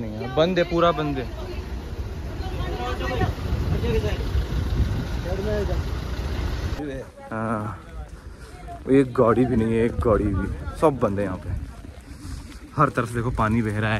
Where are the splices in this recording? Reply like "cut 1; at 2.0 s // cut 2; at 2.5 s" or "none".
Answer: cut 1; at 6.8 s